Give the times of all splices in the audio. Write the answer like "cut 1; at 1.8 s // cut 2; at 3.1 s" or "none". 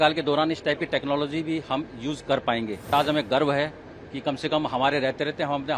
cut 1; at 2.9 s